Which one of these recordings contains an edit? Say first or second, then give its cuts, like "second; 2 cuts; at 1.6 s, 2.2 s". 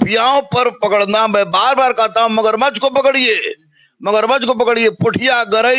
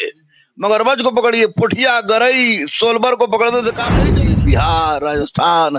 second; 1 cut; at 4.1 s